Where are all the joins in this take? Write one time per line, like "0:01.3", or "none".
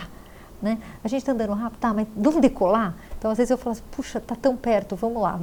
none